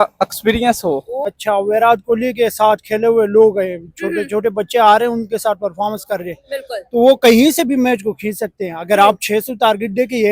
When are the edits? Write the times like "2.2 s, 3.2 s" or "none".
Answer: 1.3 s

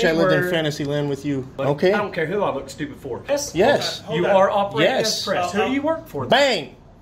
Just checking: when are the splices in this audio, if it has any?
1.5 s, 3.2 s

